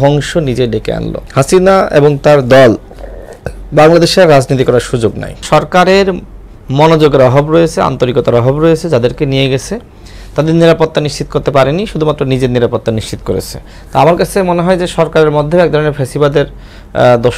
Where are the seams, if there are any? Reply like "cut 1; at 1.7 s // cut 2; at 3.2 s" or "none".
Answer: cut 1; at 1.2 s // cut 2; at 5.4 s

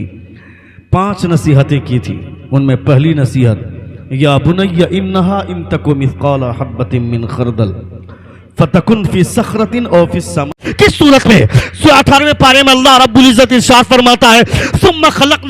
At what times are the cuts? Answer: cut 1; at 10.6 s

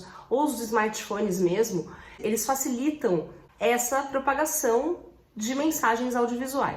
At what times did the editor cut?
cut 1; at 2.2 s // cut 2; at 3.4 s

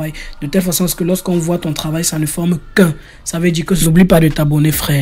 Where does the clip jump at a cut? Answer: cut 1; at 3.8 s

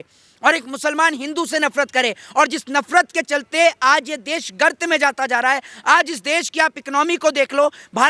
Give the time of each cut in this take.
none

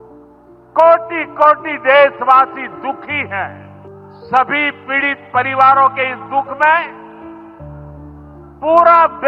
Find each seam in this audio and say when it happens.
cut 1; at 4.1 s

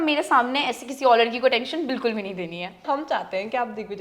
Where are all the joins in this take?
cut 1; at 2.8 s

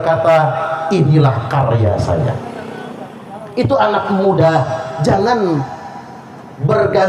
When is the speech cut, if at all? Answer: none

